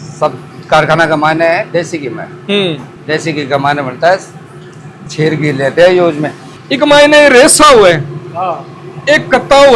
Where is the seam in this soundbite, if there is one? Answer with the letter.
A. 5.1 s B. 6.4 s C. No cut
B